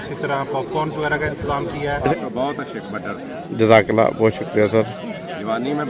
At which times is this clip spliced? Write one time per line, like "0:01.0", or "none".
0:02.1

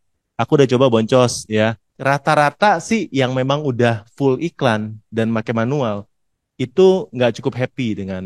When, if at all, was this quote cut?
0:01.9

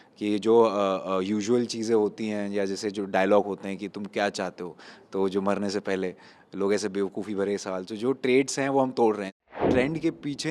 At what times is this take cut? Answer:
0:09.6

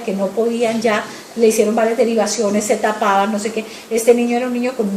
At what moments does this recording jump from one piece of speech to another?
0:03.5

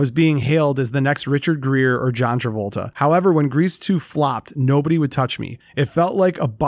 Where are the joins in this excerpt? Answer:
none

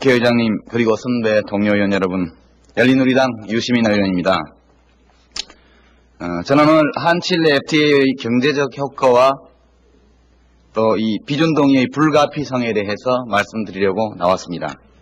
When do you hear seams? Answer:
0:09.6

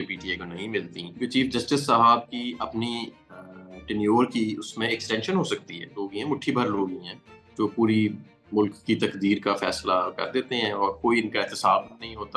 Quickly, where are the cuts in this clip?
0:01.0
0:05.8

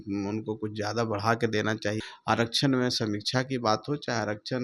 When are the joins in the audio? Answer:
0:02.1

